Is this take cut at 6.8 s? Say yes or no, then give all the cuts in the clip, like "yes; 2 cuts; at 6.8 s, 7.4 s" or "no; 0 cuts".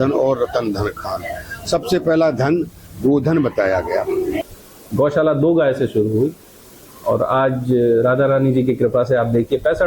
no; 1 cut; at 4.4 s